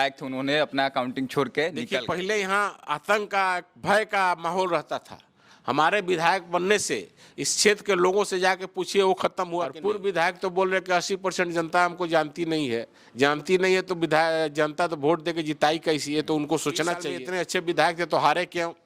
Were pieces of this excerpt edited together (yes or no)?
yes